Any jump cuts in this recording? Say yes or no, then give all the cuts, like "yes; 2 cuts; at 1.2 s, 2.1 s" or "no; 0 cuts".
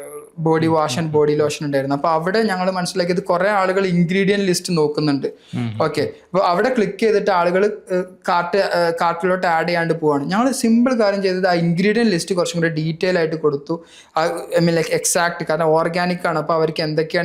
no; 0 cuts